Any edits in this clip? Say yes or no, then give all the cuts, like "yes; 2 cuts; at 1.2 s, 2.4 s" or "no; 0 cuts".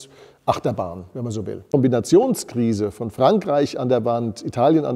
yes; 1 cut; at 1.6 s